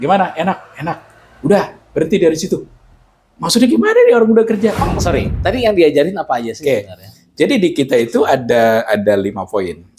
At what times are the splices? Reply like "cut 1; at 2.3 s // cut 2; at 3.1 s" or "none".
cut 1; at 5.0 s